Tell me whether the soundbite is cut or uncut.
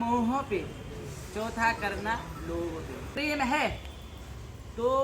cut